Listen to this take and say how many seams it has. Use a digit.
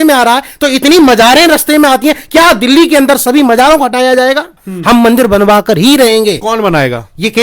1